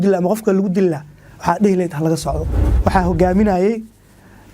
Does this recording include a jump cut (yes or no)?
yes